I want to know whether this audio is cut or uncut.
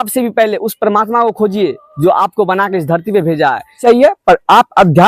cut